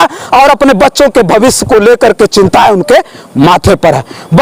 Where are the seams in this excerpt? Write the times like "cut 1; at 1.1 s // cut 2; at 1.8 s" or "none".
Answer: none

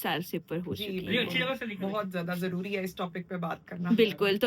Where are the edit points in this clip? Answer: none

